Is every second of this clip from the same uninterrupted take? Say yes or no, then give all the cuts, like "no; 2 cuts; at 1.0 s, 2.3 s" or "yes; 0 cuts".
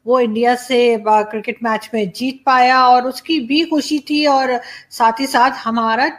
yes; 0 cuts